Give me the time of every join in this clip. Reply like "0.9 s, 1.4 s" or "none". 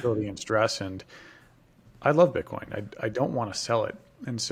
none

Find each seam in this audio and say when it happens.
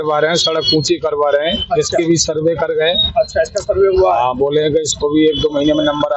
none

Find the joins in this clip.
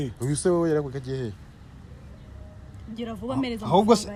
none

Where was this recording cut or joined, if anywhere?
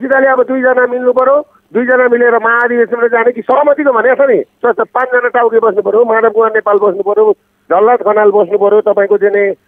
none

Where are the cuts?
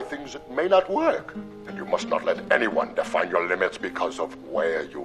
none

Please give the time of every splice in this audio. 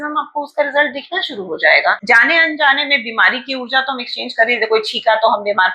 2.0 s

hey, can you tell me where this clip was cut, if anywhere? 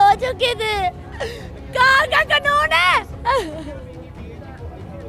none

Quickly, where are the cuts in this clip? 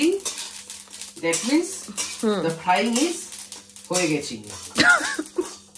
none

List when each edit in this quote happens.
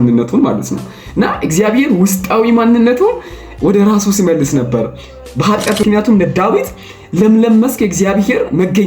5.8 s

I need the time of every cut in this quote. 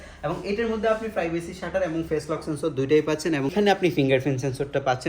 3.5 s

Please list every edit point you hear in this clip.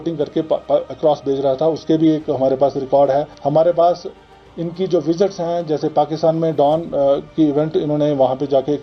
3.4 s

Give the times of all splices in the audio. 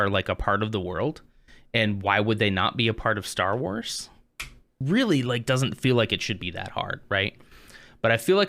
4.8 s

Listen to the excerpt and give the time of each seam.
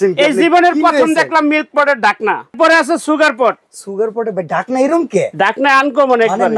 2.5 s

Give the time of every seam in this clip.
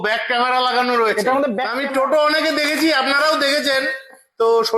1.7 s

